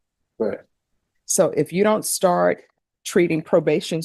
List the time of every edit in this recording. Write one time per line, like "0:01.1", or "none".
none